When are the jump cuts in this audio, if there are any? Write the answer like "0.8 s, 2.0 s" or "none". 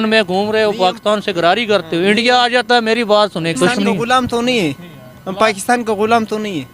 3.6 s